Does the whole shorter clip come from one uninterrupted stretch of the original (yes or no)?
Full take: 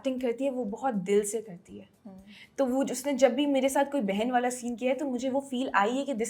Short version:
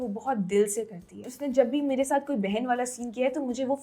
no